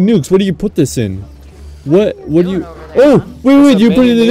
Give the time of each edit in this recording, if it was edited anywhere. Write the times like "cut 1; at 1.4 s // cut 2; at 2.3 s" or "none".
none